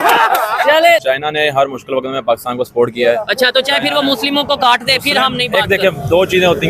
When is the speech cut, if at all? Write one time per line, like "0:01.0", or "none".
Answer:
0:01.0